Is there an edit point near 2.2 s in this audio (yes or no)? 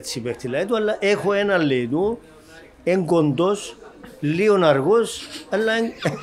no